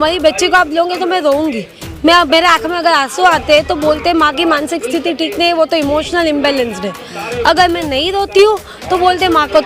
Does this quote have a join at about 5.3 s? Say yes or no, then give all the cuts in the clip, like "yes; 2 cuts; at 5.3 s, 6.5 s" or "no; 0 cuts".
no; 0 cuts